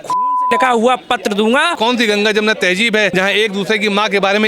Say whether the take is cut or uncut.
cut